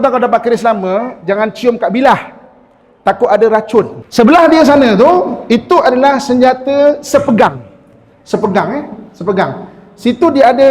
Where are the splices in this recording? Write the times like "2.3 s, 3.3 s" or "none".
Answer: 4.0 s

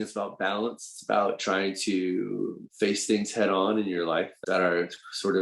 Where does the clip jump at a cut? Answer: 2.6 s, 4.4 s

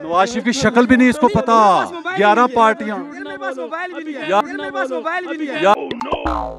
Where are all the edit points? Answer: none

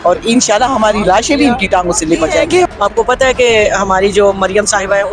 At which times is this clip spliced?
2.7 s

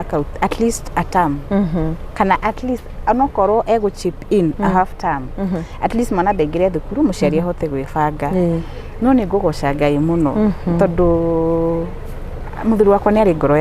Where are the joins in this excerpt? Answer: none

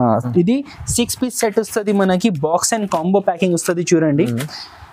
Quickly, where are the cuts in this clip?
none

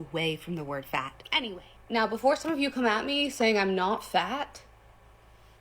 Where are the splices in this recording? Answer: 1.2 s

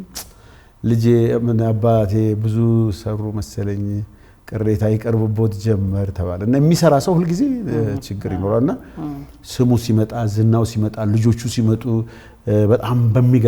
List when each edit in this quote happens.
none

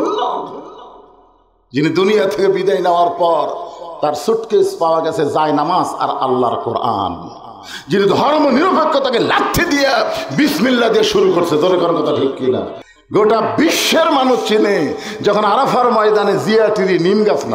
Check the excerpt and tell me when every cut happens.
12.8 s

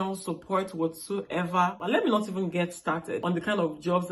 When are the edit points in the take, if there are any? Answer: 1.8 s, 3.2 s

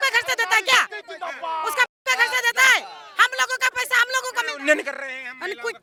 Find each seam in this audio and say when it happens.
none

